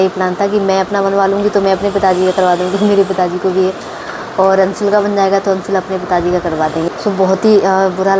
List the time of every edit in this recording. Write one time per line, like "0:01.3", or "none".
0:06.9

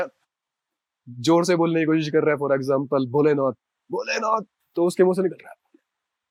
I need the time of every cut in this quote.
none

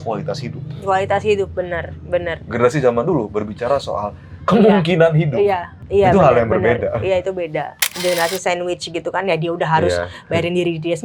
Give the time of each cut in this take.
0:05.7
0:07.9

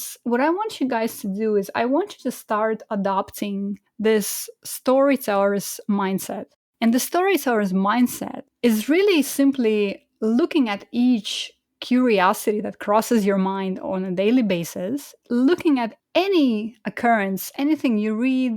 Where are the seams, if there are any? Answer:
0:15.9

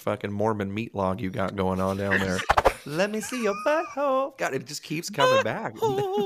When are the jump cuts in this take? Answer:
0:02.5

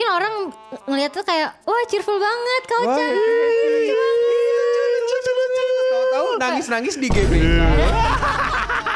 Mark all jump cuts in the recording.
none

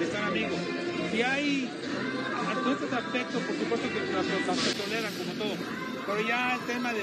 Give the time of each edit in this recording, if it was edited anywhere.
none

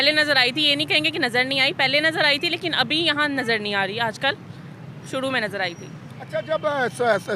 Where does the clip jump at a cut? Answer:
none

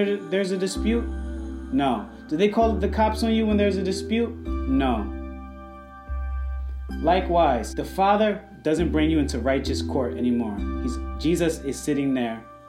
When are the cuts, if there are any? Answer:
0:07.7

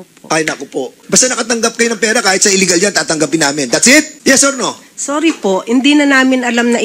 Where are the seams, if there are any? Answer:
0:01.0
0:04.1

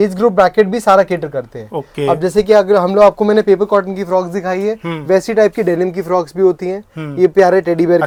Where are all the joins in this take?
none

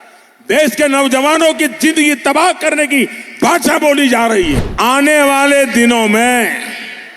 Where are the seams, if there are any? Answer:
0:04.7

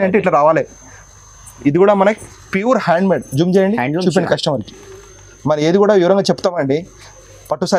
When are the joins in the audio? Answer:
none

